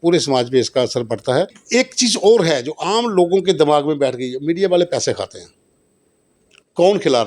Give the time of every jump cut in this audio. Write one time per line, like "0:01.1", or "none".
0:01.6